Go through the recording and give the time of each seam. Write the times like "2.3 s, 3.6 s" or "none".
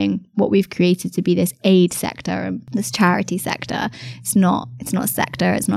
2.6 s